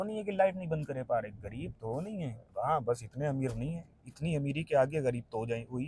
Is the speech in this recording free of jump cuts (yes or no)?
yes